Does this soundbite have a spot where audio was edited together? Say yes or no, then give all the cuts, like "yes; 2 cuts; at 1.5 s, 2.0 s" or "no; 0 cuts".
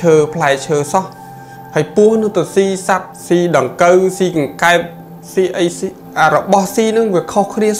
yes; 2 cuts; at 3.1 s, 6.0 s